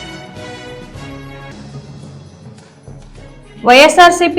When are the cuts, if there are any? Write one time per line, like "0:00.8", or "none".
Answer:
0:00.7
0:02.0